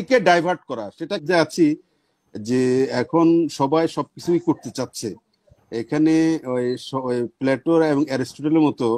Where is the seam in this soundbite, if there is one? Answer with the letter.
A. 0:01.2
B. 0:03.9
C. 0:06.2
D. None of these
A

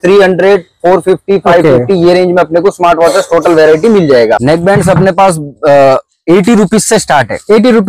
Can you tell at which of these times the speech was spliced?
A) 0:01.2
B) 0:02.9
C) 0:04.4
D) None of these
C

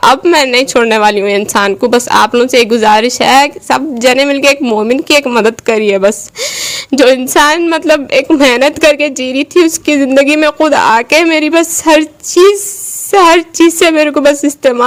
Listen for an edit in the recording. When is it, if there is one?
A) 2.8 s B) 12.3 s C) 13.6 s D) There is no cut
D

